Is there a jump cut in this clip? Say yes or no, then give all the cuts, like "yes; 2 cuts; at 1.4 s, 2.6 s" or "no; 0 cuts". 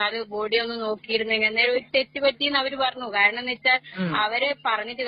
no; 0 cuts